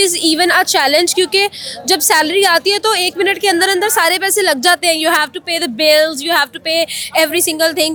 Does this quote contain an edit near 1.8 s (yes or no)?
no